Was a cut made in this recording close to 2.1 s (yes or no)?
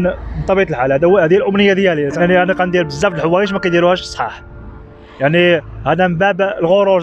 yes